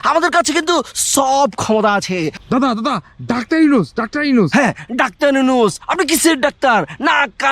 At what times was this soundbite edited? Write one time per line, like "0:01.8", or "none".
0:02.4